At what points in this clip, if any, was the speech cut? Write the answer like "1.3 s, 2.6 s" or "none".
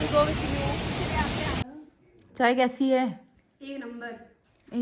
1.8 s